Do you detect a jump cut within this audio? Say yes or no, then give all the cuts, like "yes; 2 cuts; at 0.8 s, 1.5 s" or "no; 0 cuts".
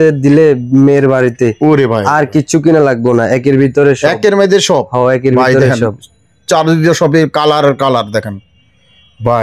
no; 0 cuts